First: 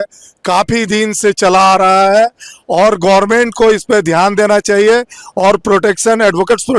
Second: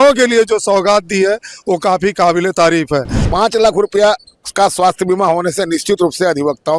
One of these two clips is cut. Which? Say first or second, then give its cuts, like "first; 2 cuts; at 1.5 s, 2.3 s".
second; 1 cut; at 3.2 s